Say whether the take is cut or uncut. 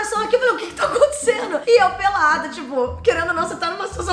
uncut